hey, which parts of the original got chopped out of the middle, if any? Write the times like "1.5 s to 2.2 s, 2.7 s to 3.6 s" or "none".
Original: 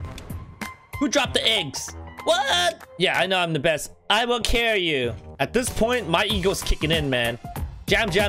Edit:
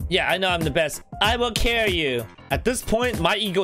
none